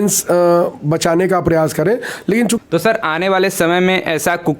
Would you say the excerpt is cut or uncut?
cut